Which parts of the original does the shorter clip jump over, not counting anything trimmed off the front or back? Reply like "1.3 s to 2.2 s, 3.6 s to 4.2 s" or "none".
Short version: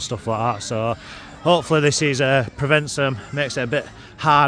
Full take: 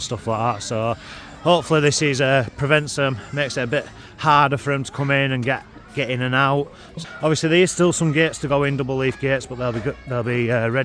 none